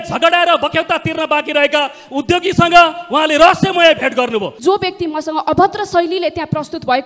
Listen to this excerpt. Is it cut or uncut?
cut